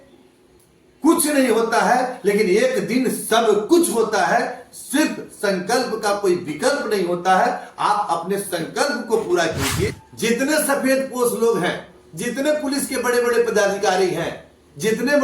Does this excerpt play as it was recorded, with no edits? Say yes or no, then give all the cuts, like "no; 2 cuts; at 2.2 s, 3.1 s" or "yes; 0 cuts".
no; 1 cut; at 10.0 s